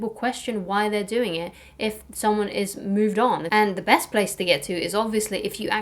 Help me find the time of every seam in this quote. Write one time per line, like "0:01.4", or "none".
0:03.4